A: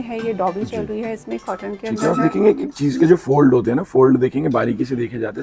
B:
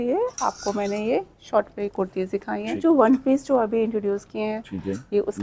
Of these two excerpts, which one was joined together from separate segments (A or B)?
B